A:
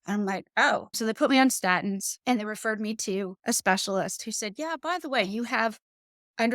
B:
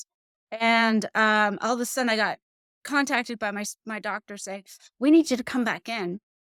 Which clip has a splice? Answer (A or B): A